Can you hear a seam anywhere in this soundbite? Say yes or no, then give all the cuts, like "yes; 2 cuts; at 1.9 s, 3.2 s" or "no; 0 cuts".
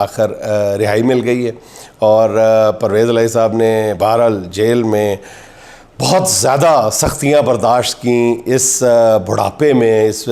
no; 0 cuts